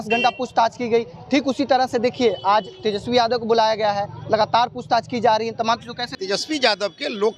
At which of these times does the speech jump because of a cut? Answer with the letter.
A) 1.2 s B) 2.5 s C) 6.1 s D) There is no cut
C